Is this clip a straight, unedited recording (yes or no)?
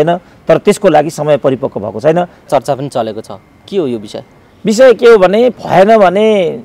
no